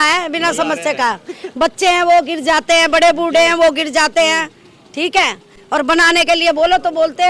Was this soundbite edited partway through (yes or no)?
no